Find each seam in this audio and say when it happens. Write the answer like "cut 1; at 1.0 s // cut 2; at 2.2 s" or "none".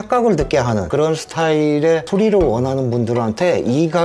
none